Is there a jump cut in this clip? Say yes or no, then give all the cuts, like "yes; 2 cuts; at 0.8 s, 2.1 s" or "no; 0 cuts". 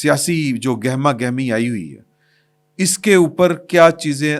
no; 0 cuts